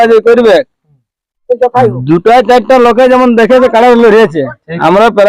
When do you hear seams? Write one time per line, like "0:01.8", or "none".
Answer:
none